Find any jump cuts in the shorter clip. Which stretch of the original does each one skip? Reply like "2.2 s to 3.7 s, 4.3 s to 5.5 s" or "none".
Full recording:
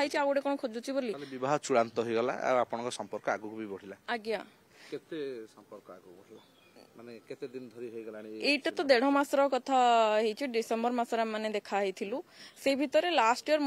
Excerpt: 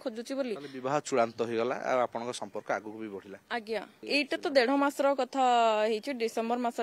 4.5 s to 8.3 s